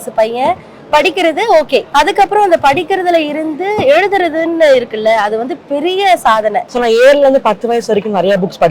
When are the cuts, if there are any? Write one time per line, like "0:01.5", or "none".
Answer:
0:01.9
0:06.6

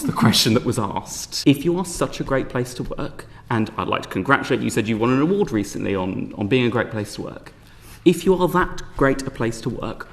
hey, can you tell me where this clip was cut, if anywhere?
0:01.2

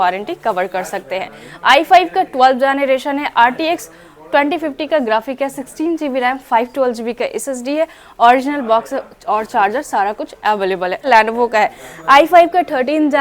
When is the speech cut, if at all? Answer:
0:11.1

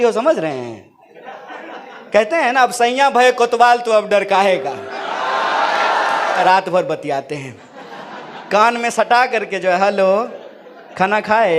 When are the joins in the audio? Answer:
0:06.4

